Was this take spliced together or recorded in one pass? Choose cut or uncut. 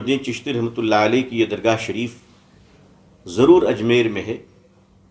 uncut